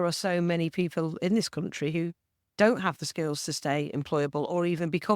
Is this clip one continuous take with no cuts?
yes; 0 cuts

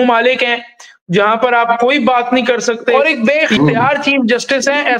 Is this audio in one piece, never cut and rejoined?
no; 1 cut; at 2.9 s

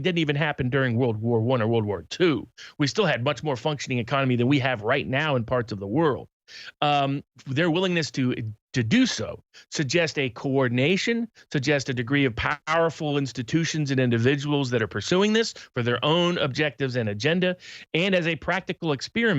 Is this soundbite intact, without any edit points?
yes; 0 cuts

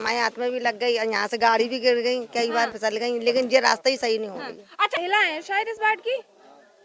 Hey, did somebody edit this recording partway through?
yes; 1 cut; at 4.9 s

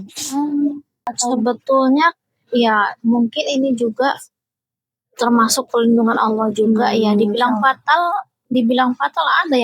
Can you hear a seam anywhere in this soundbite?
yes; 1 cut; at 1.1 s

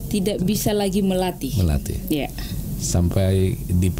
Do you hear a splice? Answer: no; 0 cuts

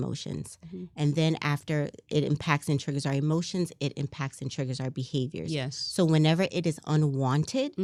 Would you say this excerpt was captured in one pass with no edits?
yes; 0 cuts

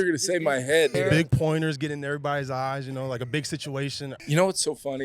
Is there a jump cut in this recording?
yes; 2 cuts; at 1.0 s, 3.6 s

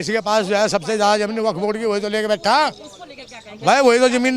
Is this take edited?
no; 0 cuts

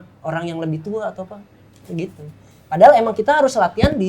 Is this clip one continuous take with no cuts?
yes; 0 cuts

